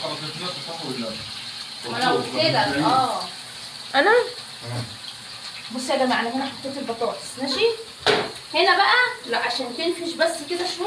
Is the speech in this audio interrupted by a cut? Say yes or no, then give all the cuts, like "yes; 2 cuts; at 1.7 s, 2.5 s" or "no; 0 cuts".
no; 0 cuts